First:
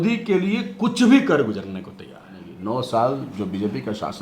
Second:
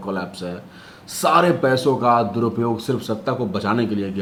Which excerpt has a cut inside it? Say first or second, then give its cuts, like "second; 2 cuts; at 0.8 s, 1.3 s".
first; 1 cut; at 2.5 s